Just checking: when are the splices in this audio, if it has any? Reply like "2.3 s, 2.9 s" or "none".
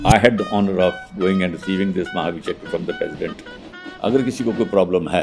3.5 s